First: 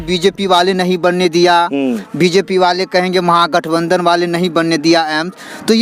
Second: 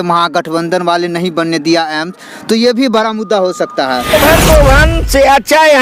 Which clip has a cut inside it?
second; 1 cut; at 4.1 s

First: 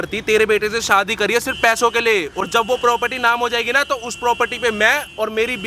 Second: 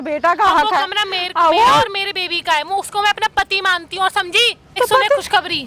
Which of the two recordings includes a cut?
second; 1 cut; at 4.8 s

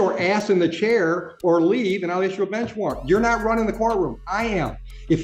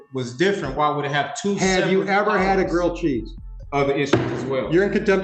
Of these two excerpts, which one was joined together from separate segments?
second; 1 cut; at 3.5 s

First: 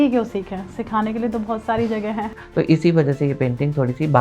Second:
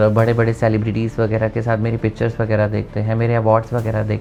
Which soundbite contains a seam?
first; 1 cut; at 2.4 s

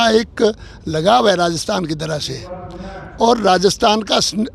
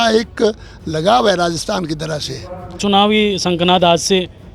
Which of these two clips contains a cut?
second; 1 cut; at 2.8 s

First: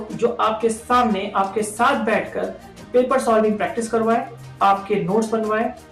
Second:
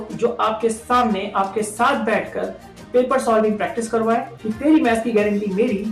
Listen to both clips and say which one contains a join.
second; 1 cut; at 4.4 s

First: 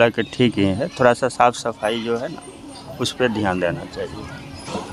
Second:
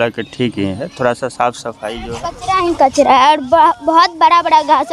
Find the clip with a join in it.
second; 1 cut; at 2.3 s

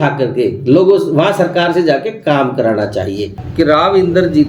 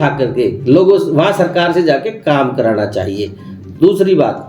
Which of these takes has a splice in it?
first; 1 cut; at 3.4 s

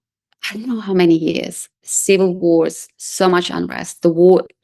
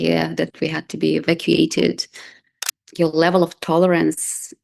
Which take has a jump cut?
second; 1 cut; at 2.7 s

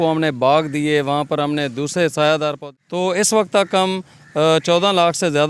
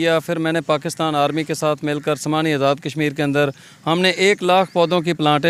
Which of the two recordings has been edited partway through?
first; 1 cut; at 2.6 s

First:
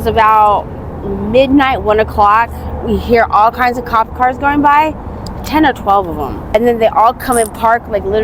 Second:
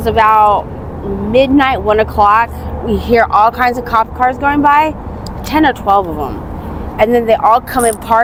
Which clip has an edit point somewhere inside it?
first; 1 cut; at 6.4 s

